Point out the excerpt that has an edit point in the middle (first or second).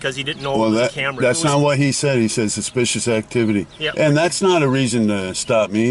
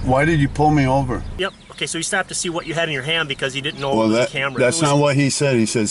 second